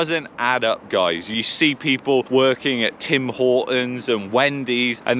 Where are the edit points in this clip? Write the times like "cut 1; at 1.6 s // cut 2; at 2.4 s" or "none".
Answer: cut 1; at 1.4 s